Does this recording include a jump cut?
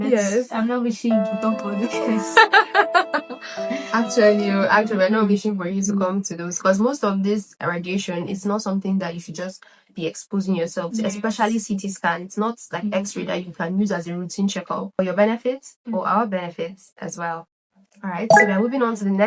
yes; 1 cut; at 15.0 s

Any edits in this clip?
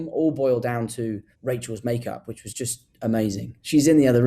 yes; 1 cut; at 1.3 s

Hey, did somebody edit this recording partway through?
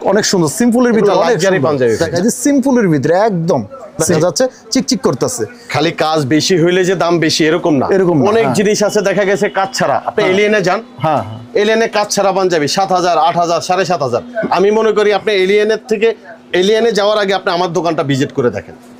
yes; 2 cuts; at 2.1 s, 4.2 s

